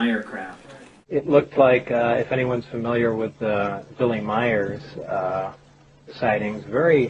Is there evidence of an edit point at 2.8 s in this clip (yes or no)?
no